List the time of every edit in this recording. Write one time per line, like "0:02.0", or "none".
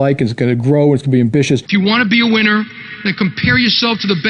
0:01.7

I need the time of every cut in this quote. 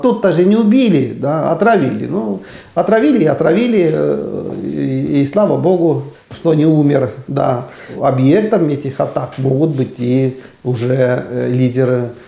0:06.2
0:07.9

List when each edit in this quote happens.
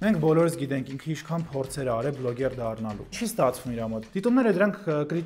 0:03.1
0:04.0

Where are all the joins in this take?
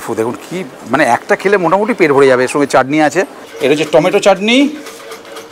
0:03.4

